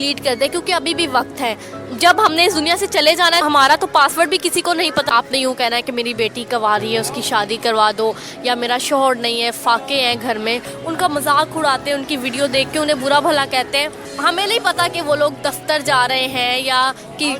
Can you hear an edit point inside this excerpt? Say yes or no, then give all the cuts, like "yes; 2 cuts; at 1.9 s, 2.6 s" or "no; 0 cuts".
yes; 4 cuts; at 3.4 s, 5.1 s, 10.7 s, 14.0 s